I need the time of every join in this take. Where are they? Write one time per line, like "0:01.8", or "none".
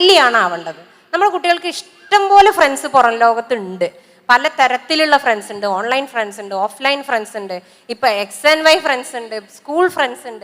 none